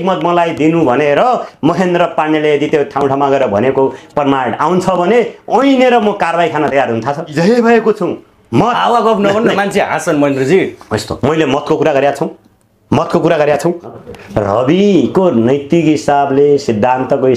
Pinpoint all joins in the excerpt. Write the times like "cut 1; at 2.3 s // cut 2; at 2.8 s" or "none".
cut 1; at 7.3 s // cut 2; at 14.0 s